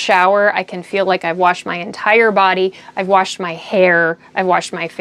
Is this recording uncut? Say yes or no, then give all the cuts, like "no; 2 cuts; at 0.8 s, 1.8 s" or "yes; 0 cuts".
yes; 0 cuts